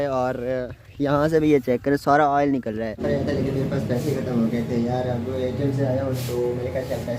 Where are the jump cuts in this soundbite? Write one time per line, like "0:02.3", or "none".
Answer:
0:03.0